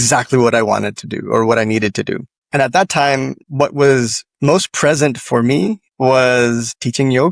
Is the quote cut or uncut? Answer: uncut